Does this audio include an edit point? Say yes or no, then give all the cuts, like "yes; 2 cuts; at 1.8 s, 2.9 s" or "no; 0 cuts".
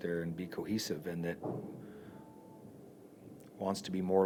no; 0 cuts